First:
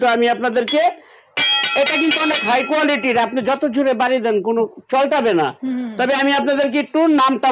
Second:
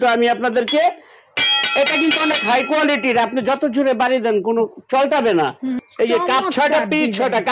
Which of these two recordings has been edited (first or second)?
second